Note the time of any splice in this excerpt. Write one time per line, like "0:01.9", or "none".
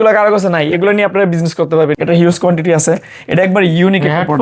0:02.0